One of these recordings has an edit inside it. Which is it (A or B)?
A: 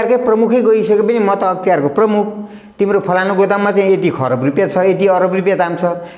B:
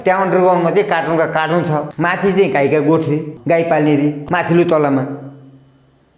B